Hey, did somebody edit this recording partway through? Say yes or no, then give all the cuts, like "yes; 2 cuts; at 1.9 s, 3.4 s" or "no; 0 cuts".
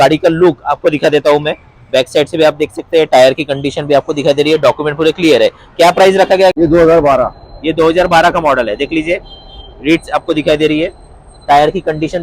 yes; 1 cut; at 6.5 s